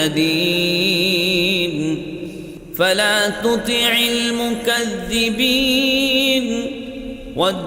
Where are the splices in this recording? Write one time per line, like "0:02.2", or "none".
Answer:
none